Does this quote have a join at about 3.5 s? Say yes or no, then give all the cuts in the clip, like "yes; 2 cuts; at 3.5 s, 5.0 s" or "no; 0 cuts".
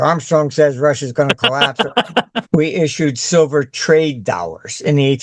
no; 1 cut; at 2.3 s